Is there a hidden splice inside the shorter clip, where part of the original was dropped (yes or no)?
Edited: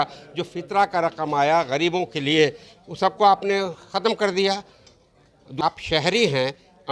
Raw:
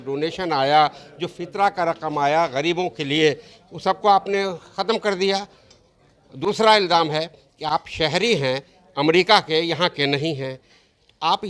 yes